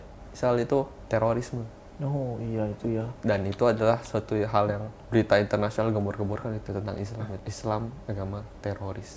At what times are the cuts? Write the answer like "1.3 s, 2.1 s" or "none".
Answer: 1.0 s, 4.9 s, 7.4 s